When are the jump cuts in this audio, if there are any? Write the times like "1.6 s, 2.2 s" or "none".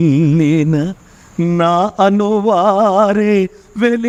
none